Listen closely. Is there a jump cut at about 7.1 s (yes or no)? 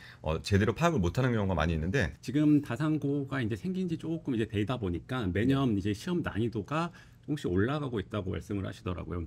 no